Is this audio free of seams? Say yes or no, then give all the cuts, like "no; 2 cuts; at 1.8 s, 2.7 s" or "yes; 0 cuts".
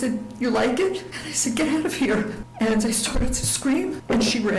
yes; 0 cuts